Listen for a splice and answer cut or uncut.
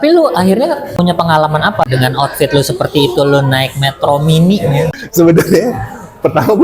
cut